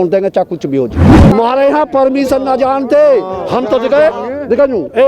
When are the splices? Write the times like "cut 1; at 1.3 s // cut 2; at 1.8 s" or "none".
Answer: cut 1; at 1.1 s